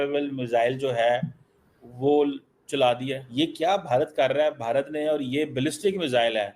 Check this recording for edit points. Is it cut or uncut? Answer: cut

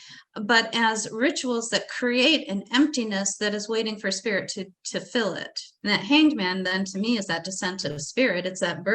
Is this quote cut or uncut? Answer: cut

